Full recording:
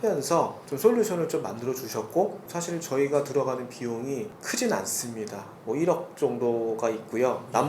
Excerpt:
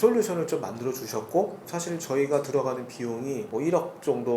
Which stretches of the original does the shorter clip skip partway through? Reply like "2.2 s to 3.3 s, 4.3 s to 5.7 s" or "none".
4.3 s to 5.6 s